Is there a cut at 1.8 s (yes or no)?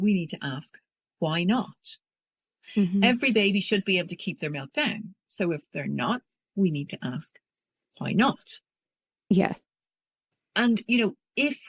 no